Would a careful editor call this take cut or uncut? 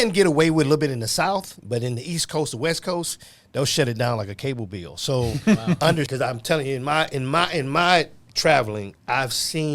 cut